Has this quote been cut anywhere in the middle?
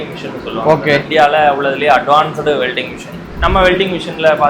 yes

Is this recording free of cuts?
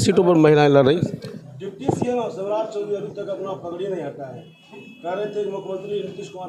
no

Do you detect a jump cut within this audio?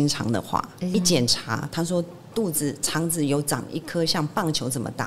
yes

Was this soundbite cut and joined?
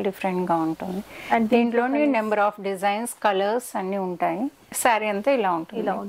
yes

